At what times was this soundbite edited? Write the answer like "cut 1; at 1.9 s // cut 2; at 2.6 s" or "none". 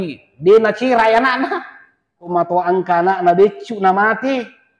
cut 1; at 2.3 s